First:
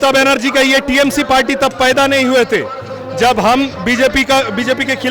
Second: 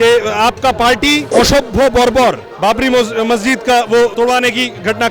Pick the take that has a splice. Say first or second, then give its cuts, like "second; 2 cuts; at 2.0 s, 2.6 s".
second; 2 cuts; at 1.3 s, 4.1 s